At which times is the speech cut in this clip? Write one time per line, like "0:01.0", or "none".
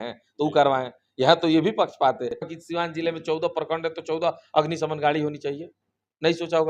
0:02.5